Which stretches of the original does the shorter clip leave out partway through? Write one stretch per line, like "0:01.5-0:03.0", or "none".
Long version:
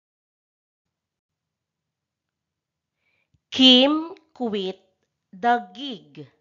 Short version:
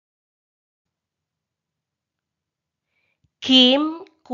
0:01.2-0:01.3